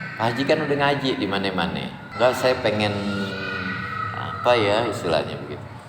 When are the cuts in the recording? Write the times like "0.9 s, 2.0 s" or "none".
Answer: 2.0 s